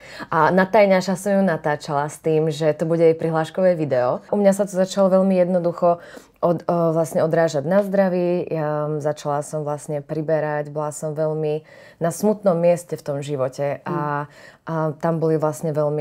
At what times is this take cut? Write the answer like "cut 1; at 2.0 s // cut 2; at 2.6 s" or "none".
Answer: cut 1; at 4.3 s